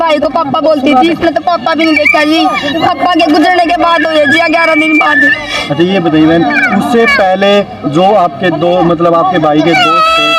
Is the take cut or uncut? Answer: uncut